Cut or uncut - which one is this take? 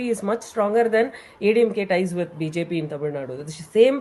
uncut